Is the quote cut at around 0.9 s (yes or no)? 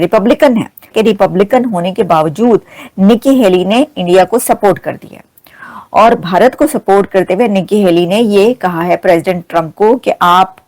yes